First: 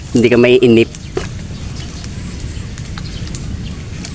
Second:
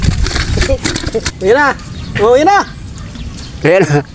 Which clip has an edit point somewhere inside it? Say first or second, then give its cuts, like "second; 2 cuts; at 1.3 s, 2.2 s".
second; 1 cut; at 1.3 s